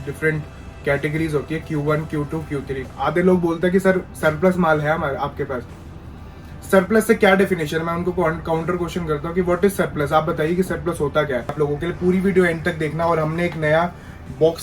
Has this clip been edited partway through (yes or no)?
yes